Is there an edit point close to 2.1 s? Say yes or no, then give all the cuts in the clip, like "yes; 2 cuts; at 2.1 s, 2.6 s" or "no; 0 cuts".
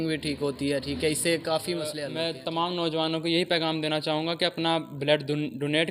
yes; 1 cut; at 2.1 s